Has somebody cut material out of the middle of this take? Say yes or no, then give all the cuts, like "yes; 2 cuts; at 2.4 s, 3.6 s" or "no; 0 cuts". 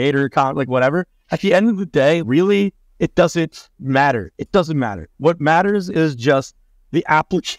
no; 0 cuts